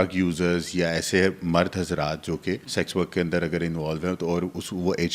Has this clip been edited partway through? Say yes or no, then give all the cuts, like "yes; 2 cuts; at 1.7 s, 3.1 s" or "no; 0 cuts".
yes; 1 cut; at 2.6 s